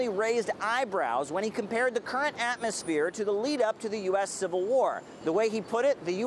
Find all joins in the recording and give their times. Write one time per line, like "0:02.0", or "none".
0:03.1